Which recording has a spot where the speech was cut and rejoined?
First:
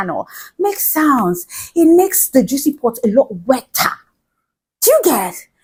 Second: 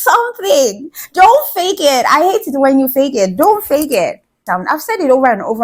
second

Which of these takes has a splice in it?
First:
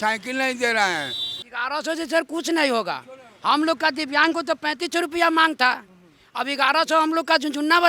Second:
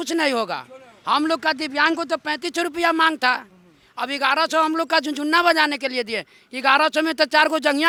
first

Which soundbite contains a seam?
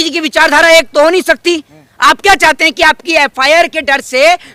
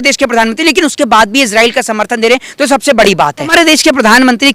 second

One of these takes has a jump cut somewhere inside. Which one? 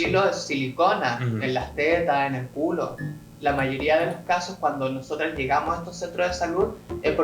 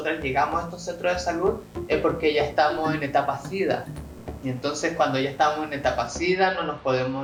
first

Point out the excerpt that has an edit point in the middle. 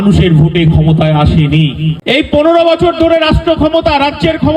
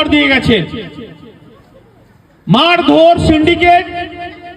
first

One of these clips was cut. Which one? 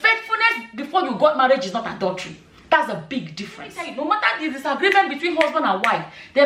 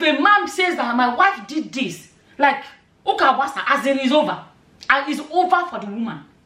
first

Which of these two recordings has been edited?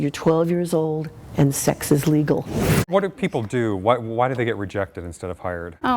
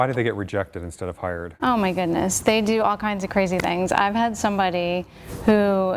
first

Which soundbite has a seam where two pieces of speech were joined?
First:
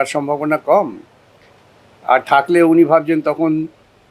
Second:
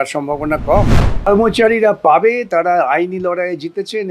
second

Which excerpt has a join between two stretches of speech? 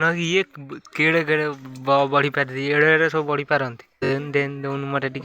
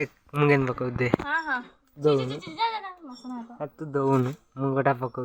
first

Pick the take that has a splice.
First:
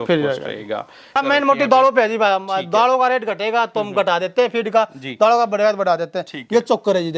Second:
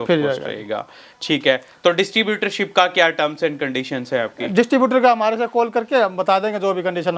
first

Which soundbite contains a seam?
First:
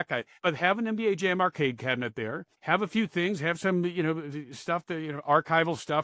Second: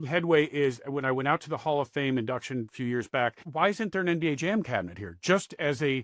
second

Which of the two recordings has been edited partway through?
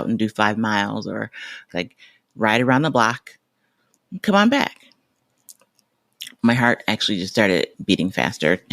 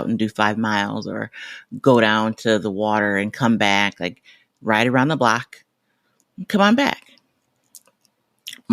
first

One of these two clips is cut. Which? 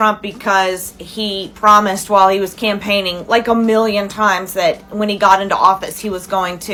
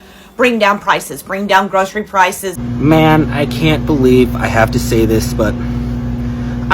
second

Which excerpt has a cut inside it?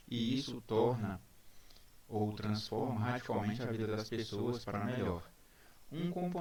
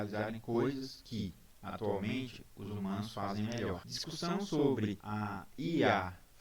second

